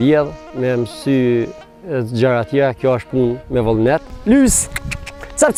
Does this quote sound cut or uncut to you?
uncut